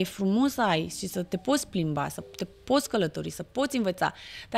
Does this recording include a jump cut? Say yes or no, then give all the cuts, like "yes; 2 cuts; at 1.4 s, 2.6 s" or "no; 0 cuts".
no; 0 cuts